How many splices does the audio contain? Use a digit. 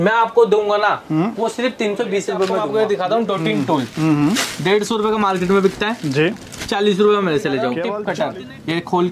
2